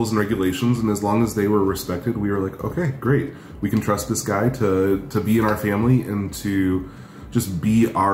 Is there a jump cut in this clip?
no; 0 cuts

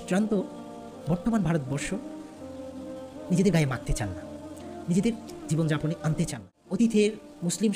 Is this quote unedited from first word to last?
no; 1 cut; at 6.8 s

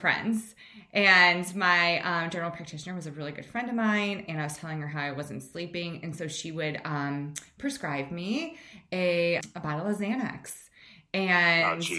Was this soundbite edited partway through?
yes; 1 cut; at 9.5 s

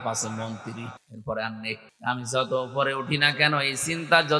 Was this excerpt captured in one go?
no; 2 cuts; at 1.1 s, 1.9 s

